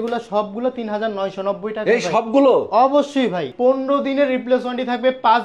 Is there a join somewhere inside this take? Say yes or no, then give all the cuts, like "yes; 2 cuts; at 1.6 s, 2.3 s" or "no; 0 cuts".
yes; 1 cut; at 3.5 s